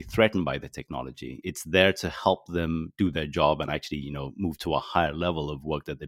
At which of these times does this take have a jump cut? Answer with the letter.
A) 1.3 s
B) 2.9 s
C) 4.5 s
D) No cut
A